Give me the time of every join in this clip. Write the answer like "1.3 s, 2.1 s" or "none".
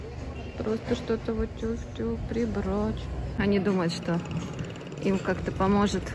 3.4 s